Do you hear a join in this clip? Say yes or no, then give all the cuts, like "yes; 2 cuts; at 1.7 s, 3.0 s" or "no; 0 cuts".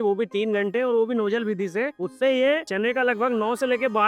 yes; 2 cuts; at 2.0 s, 2.7 s